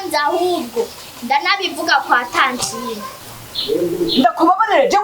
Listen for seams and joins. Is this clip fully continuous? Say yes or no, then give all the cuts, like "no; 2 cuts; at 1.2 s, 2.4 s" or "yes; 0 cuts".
no; 1 cut; at 3.2 s